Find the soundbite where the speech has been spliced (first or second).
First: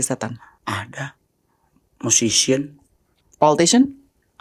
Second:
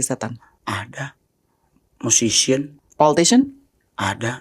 second